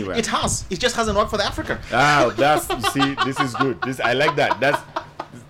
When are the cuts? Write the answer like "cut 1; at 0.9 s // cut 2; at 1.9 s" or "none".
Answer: none